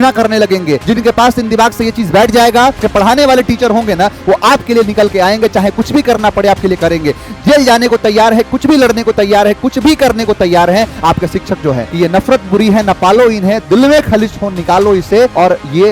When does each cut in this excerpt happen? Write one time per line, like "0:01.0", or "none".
0:02.8
0:11.9